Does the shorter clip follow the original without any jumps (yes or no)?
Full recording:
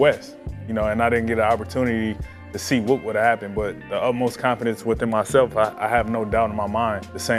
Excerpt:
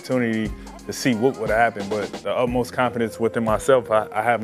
yes